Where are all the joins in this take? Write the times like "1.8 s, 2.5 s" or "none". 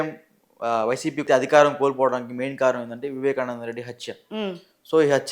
1.2 s

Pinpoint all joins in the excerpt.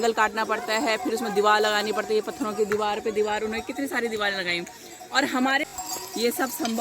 5.6 s

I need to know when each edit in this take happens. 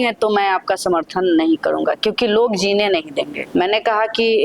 3.4 s

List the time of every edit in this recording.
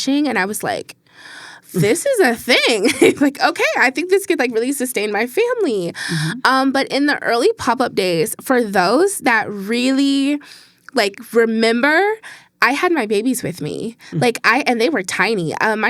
none

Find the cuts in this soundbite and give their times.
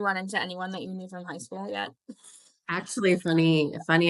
none

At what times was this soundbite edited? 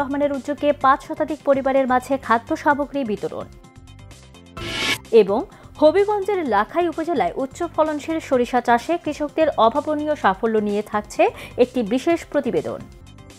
none

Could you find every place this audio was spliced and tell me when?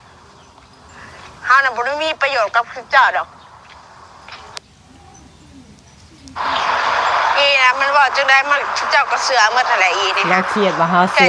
none

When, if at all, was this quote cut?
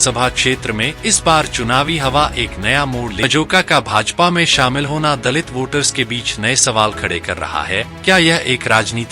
3.2 s

